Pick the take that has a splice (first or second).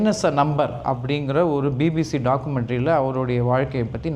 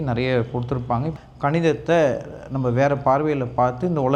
second